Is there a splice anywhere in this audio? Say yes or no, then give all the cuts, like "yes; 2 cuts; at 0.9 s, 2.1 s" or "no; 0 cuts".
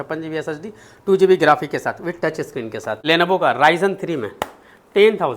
yes; 1 cut; at 3.0 s